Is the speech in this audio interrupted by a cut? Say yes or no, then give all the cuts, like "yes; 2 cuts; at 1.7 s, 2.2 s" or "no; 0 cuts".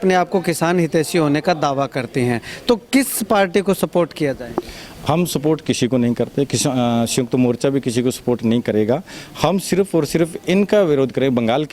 no; 0 cuts